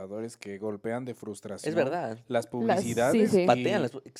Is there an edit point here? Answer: no; 0 cuts

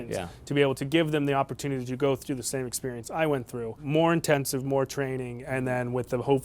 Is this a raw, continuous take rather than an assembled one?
no; 1 cut; at 3.8 s

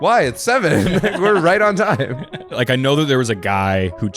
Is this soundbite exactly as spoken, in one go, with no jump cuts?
no; 1 cut; at 2.6 s

